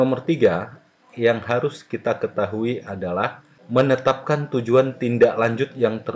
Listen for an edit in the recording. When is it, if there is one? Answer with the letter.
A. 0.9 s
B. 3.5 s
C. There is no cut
B